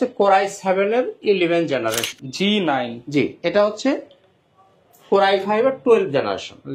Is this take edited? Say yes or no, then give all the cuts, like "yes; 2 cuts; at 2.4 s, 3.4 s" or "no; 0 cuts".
yes; 1 cut; at 2.1 s